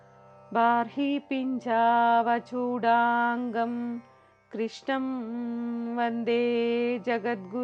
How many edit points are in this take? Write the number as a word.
zero